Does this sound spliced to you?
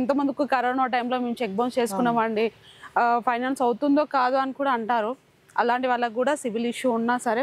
no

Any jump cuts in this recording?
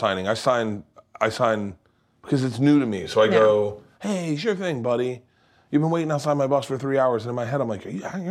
no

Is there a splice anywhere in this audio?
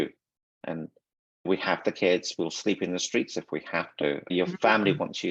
yes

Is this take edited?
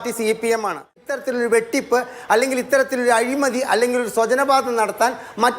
yes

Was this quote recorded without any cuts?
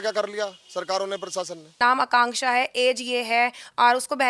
no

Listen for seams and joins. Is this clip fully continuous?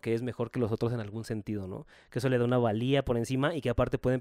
yes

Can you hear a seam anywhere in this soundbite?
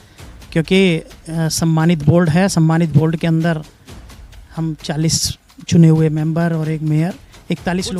no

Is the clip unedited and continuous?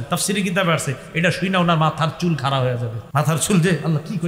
no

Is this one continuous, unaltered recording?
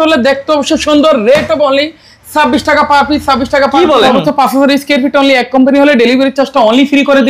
no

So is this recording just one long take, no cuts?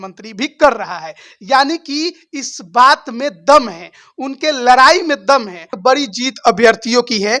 no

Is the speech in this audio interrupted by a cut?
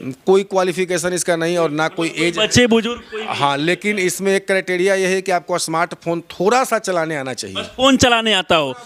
no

